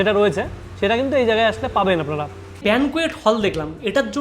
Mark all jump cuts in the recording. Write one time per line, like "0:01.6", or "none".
0:02.6